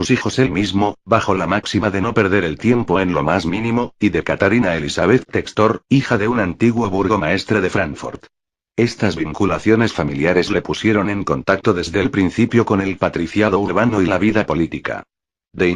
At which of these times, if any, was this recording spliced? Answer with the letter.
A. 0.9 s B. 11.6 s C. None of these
B